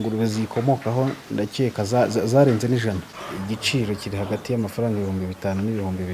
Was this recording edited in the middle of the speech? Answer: yes; 1 cut; at 3.1 s

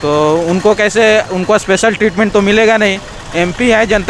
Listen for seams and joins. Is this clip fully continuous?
yes; 0 cuts

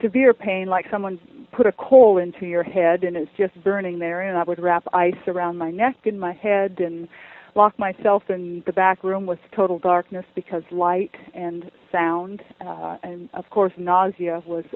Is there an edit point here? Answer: no; 0 cuts

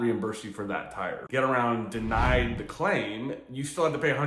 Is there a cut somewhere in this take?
yes; 1 cut; at 1.2 s

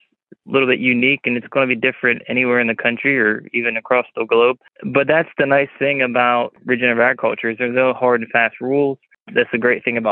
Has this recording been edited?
yes; 3 cuts; at 4.7 s, 6.6 s, 9.1 s

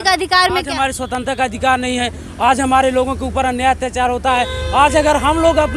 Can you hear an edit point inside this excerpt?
no; 0 cuts

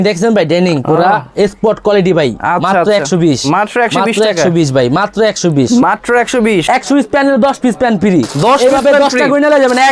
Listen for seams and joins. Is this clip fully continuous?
no; 1 cut; at 6.6 s

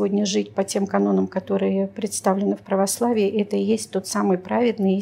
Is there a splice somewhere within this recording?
no; 0 cuts

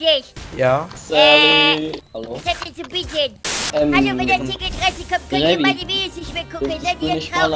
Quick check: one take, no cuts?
no; 1 cut; at 3.6 s

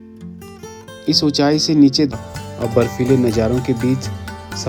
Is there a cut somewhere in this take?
yes; 1 cut; at 2.1 s

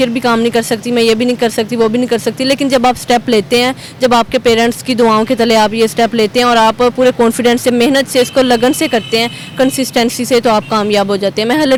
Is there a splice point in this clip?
no; 0 cuts

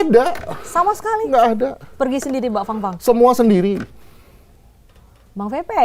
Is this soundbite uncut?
yes; 0 cuts

